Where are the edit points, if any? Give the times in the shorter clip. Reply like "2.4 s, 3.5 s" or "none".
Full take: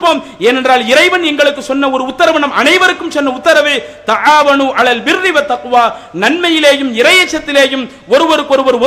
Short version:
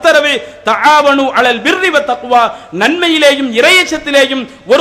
none